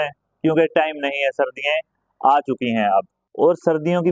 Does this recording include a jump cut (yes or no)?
yes